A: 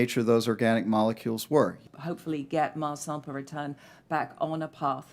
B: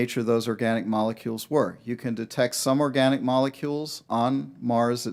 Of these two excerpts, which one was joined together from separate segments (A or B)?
A